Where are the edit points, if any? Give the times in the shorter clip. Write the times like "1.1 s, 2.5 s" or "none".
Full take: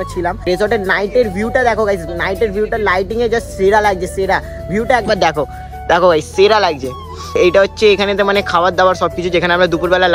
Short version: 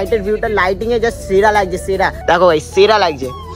2.2 s